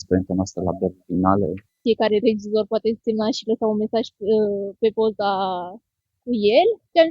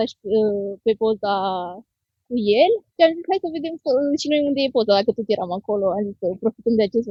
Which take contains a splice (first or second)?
first